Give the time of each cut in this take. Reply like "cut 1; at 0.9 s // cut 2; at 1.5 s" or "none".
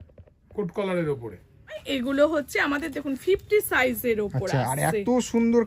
cut 1; at 1.8 s

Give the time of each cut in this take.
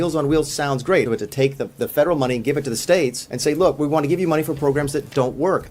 cut 1; at 1.1 s // cut 2; at 3.3 s

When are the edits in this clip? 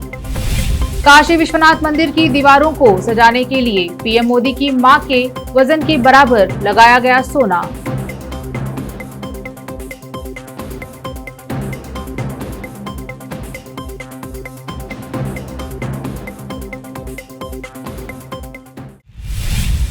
cut 1; at 19.0 s

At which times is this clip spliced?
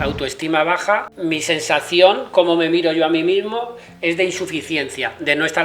cut 1; at 1.1 s

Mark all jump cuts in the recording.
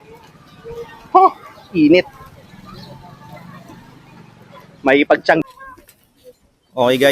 cut 1; at 5.4 s

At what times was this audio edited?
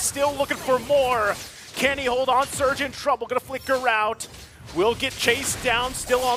none

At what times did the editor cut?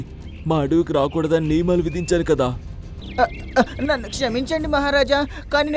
cut 1; at 3.0 s

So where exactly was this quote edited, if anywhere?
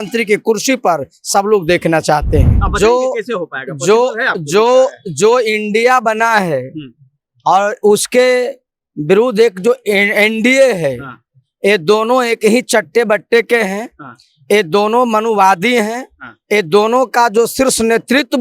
cut 1; at 2.6 s

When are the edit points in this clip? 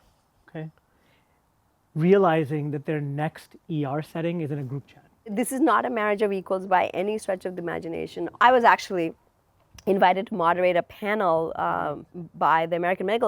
cut 1; at 5.3 s // cut 2; at 8.3 s

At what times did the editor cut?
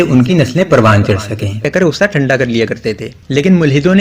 cut 1; at 1.6 s

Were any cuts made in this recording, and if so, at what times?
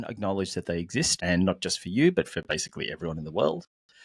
cut 1; at 1.1 s

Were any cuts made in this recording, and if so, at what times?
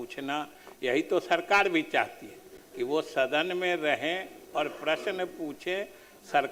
none

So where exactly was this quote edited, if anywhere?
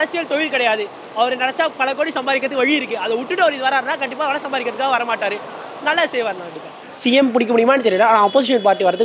none

